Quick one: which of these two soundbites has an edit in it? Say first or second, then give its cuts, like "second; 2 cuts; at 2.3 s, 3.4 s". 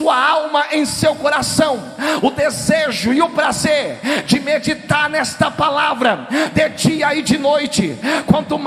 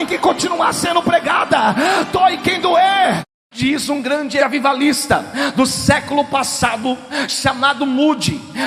second; 2 cuts; at 3.2 s, 4.4 s